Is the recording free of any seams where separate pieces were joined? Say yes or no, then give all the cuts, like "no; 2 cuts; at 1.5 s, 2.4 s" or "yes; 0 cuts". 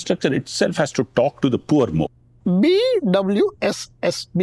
yes; 0 cuts